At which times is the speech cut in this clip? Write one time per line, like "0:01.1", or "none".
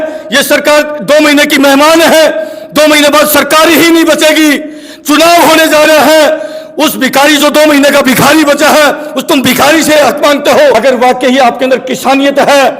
0:10.7

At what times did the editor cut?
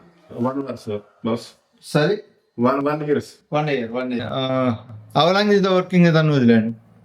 0:04.1

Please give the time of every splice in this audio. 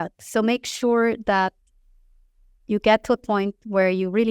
none

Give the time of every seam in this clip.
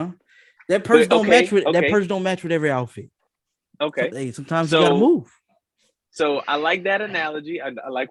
none

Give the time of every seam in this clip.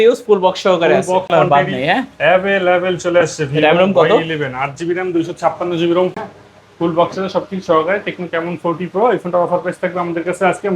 0:01.3
0:06.1

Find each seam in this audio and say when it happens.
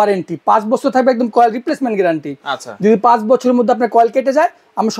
none

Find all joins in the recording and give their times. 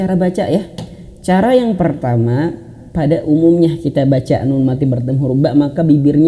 none

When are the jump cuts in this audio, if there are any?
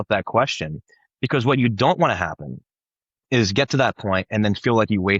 none

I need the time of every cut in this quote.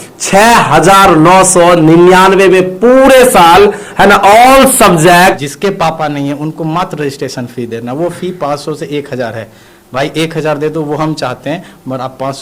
0:05.4

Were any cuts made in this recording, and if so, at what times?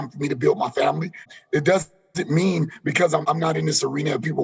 0:01.3
0:03.2

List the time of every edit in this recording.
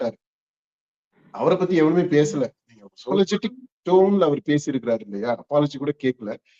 0:03.0

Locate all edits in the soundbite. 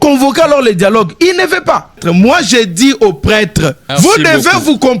0:02.0
0:03.8

